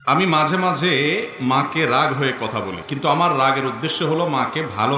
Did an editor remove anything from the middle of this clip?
yes; 1 cut; at 2.8 s

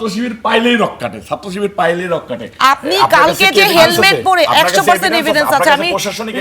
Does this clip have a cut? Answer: yes; 1 cut; at 2.4 s

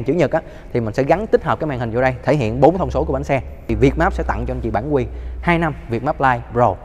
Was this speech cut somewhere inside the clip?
yes; 1 cut; at 3.6 s

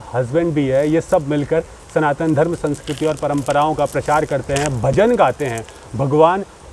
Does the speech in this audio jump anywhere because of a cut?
no; 0 cuts

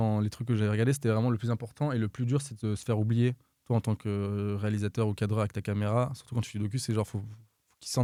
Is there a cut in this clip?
no; 0 cuts

